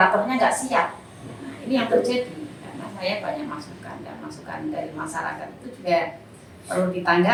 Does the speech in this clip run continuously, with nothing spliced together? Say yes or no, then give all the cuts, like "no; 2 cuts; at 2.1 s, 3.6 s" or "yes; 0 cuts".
yes; 0 cuts